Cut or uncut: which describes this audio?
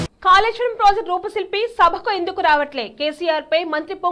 uncut